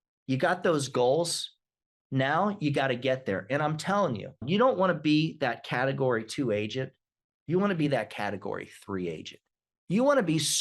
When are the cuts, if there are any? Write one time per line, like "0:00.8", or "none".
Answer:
0:04.4